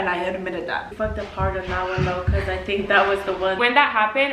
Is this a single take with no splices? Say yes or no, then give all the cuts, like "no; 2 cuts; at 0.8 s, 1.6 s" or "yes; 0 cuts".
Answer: no; 2 cuts; at 0.9 s, 3.6 s